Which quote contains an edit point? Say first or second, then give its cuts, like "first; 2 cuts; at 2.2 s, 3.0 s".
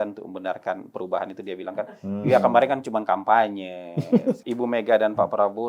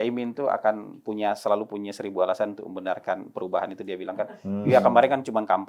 first; 1 cut; at 4.4 s